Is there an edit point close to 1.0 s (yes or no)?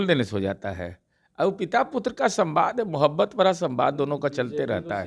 no